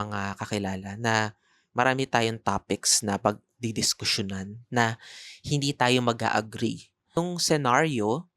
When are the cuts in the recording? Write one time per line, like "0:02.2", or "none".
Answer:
0:07.2